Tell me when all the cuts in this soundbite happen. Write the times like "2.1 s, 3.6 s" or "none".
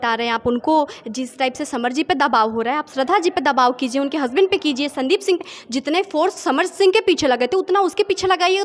none